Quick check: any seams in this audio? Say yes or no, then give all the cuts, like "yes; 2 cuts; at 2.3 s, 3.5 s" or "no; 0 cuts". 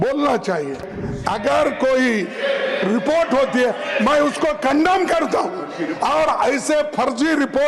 yes; 1 cut; at 1.0 s